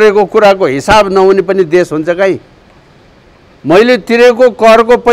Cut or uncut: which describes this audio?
uncut